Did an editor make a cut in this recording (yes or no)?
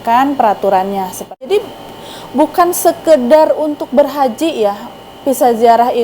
yes